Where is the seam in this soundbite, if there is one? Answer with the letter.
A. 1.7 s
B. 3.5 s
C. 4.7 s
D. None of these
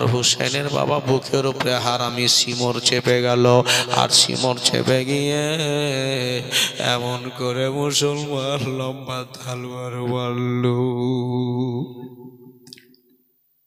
D